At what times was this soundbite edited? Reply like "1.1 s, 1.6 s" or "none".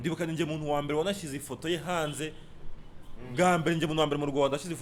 none